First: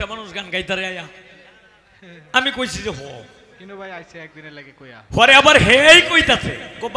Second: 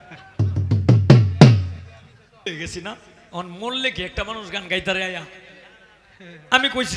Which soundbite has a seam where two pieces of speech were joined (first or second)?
second